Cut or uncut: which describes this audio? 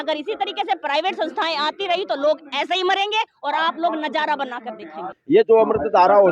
cut